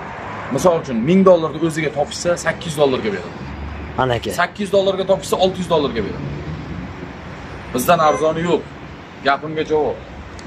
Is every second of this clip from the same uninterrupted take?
yes; 0 cuts

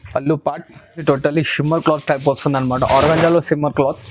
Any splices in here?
yes; 1 cut; at 1.0 s

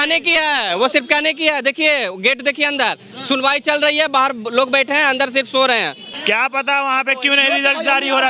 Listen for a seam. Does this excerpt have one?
yes; 1 cut; at 6.1 s

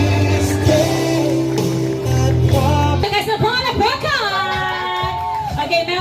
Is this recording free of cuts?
no; 1 cut; at 3.0 s

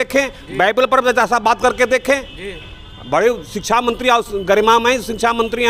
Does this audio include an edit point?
no; 0 cuts

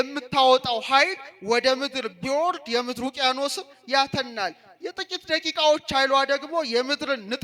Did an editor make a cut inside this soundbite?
no; 0 cuts

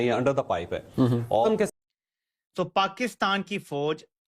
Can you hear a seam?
yes; 1 cut; at 1.7 s

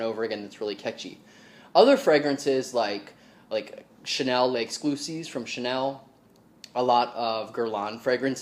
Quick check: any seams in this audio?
no; 0 cuts

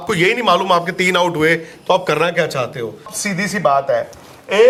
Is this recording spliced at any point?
no; 0 cuts

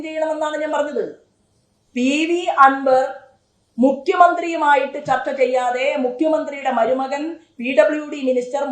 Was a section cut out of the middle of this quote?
no; 0 cuts

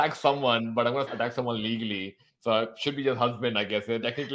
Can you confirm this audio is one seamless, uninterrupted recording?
no; 1 cut; at 1.1 s

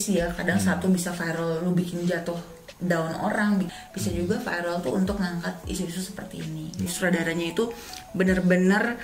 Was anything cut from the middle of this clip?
yes; 2 cuts; at 3.7 s, 6.9 s

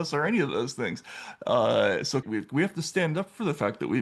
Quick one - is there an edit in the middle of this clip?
yes; 1 cut; at 2.2 s

